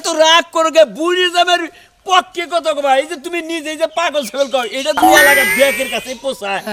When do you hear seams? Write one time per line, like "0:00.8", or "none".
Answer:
none